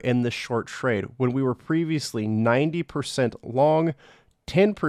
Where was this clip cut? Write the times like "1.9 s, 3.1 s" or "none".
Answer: none